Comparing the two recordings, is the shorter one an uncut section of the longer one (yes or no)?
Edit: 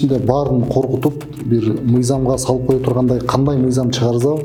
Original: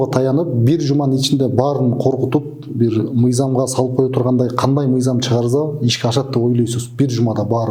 yes